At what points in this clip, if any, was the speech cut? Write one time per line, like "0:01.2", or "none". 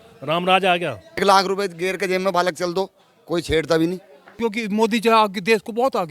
0:01.2
0:04.2